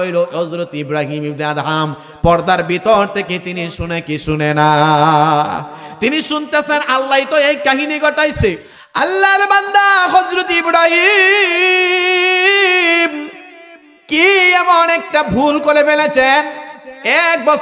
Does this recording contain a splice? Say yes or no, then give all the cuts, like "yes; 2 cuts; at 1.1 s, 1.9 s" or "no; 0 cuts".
yes; 1 cut; at 8.7 s